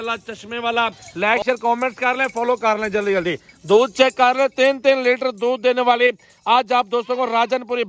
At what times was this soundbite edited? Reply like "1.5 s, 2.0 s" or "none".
1.0 s